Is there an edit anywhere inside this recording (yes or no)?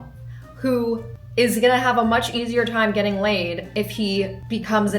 yes